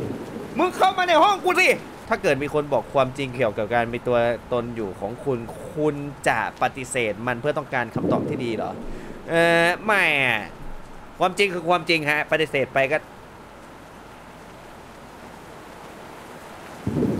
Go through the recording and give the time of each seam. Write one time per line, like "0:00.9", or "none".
0:01.9

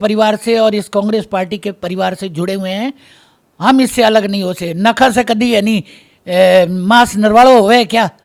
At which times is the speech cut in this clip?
none

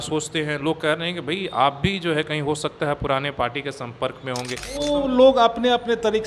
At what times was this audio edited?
0:04.7

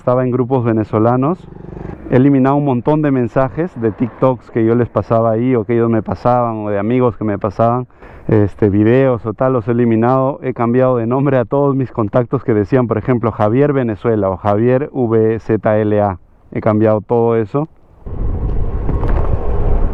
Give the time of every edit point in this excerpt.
none

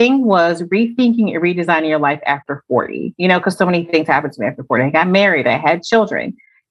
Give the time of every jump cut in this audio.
0:03.1

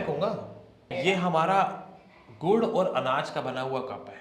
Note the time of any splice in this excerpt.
0:00.9

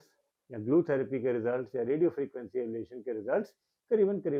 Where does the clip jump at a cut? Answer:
none

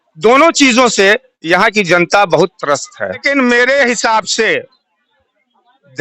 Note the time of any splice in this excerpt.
0:03.2

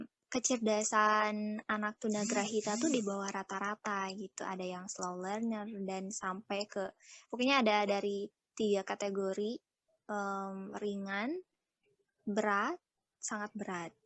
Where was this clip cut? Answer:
none

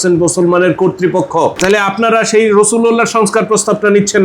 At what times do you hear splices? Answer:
0:01.6

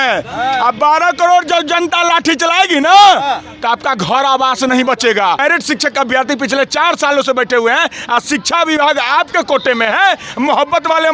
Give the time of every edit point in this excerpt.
0:05.4

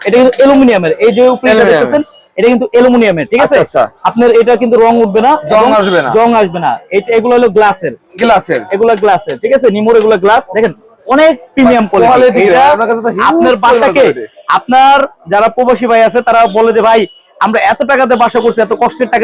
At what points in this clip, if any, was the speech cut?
none

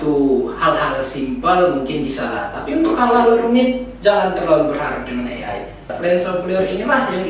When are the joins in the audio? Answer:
0:05.9

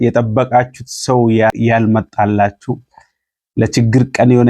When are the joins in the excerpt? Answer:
0:01.5

